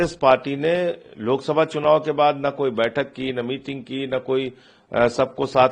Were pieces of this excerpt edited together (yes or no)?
no